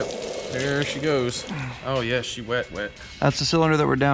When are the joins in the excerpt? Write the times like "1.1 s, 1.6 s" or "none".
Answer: none